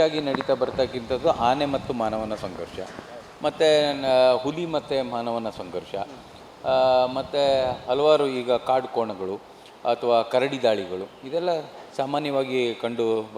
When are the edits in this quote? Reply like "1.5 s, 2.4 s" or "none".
none